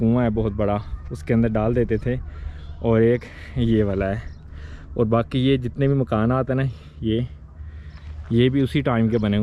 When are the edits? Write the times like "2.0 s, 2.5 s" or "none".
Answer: none